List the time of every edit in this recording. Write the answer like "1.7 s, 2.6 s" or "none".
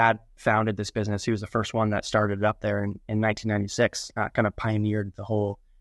none